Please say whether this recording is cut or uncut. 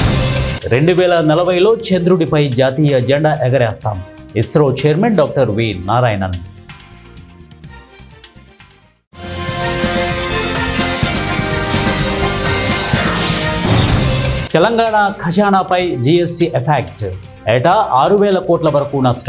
cut